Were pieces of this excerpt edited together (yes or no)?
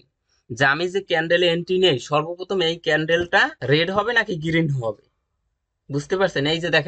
yes